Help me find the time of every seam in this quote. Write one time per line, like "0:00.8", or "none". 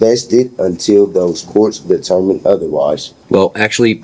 0:03.1